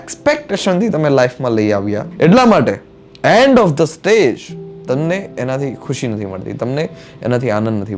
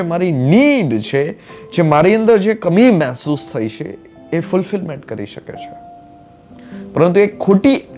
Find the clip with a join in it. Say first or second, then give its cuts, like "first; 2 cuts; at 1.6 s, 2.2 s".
first; 1 cut; at 2.1 s